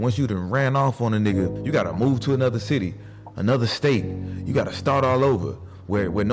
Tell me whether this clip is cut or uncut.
cut